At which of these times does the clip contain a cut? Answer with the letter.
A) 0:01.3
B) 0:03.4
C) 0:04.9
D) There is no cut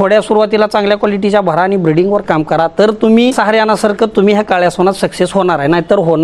B